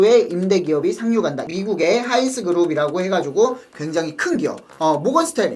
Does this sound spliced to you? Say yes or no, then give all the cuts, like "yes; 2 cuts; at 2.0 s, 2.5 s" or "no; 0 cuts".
yes; 1 cut; at 1.5 s